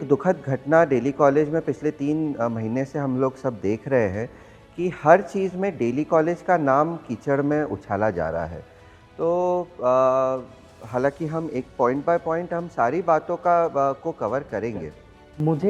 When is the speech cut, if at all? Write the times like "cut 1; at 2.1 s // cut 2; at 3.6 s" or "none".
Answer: none